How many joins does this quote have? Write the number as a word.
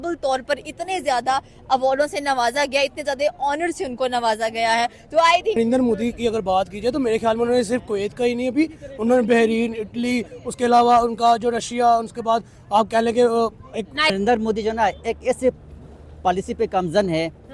two